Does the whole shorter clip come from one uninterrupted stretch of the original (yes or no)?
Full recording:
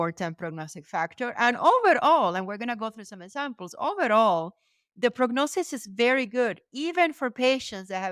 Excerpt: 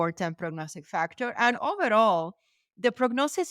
no